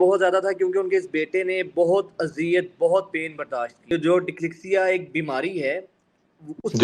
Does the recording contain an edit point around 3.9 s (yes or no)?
yes